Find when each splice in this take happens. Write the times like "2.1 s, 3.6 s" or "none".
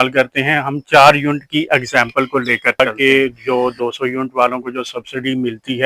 2.8 s